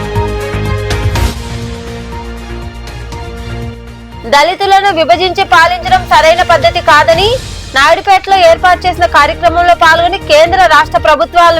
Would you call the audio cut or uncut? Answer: cut